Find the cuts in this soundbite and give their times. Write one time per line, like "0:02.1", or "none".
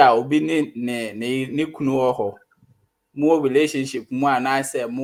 none